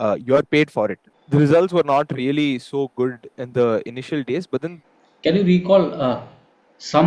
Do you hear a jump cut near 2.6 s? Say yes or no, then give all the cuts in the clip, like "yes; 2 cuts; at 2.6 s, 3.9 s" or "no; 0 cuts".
no; 2 cuts; at 1.1 s, 4.8 s